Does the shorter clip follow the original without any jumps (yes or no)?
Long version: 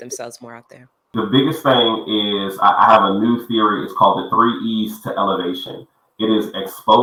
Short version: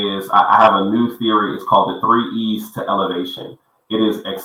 yes